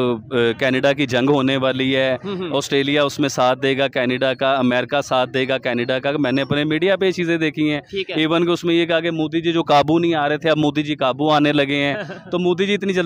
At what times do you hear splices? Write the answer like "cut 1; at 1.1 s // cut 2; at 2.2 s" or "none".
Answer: none